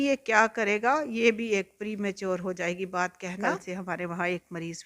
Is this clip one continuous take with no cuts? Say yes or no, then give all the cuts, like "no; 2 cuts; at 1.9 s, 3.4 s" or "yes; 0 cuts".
no; 1 cut; at 3.5 s